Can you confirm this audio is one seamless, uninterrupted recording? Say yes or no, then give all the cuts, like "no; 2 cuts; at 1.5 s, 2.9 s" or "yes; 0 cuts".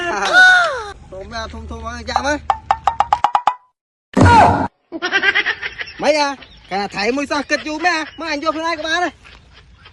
no; 1 cut; at 1.0 s